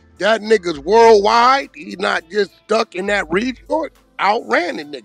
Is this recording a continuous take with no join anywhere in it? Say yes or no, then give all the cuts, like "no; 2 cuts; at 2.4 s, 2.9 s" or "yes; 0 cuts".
no; 1 cut; at 3.6 s